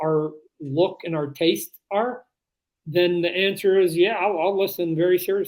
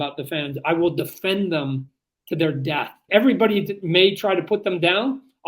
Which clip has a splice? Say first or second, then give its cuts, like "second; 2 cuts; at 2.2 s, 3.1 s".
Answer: second; 1 cut; at 3.0 s